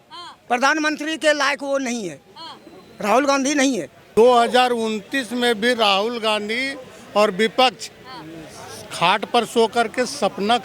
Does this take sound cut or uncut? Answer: cut